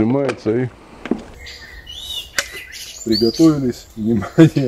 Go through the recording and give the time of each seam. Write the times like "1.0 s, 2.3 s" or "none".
1.3 s